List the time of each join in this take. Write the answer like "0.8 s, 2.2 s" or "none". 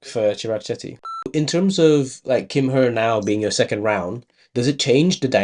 1.3 s